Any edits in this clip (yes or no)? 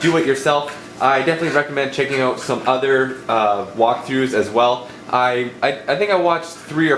yes